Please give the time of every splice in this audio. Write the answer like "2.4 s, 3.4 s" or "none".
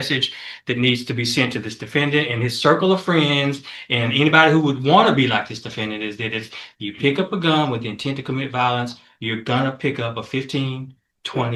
none